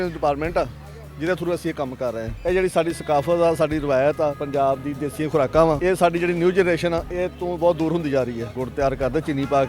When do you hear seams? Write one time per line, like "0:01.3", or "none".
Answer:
0:02.3
0:08.6